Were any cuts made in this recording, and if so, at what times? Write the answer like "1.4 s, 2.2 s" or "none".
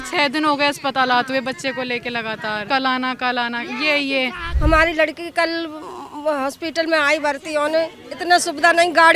2.6 s, 4.4 s